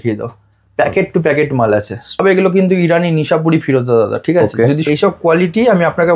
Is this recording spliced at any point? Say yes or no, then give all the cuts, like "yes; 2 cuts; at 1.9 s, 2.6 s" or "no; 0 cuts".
yes; 2 cuts; at 2.2 s, 4.8 s